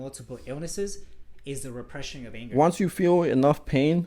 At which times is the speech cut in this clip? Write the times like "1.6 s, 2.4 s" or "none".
2.4 s